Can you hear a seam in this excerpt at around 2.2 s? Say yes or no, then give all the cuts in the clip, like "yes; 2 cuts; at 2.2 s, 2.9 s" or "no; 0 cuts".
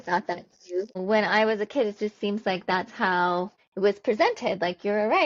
no; 2 cuts; at 1.0 s, 3.6 s